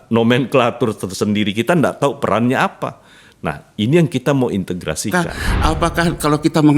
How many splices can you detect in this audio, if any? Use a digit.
1